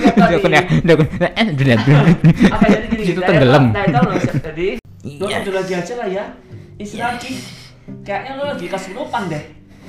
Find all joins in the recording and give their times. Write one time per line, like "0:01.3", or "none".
0:04.9